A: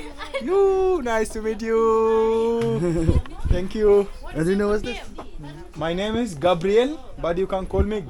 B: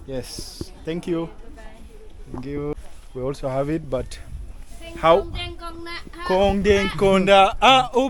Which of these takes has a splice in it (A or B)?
B